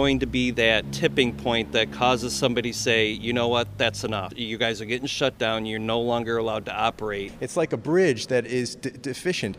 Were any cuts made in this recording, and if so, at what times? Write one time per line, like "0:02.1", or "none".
0:00.9
0:04.4
0:07.3